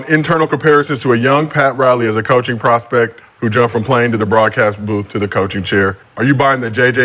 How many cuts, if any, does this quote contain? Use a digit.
1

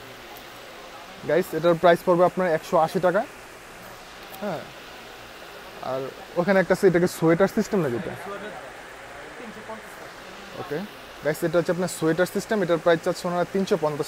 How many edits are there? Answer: 0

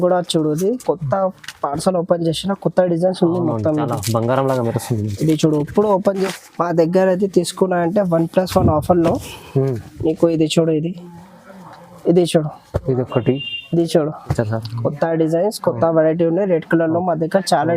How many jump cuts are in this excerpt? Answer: 2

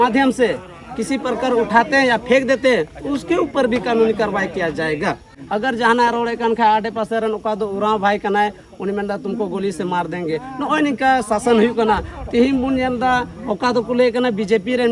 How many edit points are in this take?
1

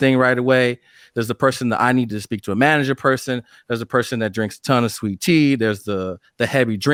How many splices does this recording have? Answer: 0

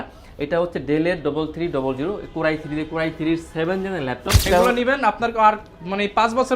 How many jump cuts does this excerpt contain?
1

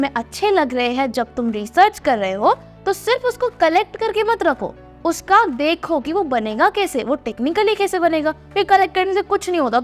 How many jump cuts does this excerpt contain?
0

